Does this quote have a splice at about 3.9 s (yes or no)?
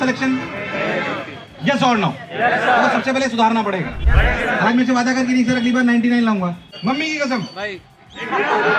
yes